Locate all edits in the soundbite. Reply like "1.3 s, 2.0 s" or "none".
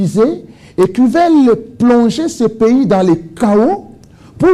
none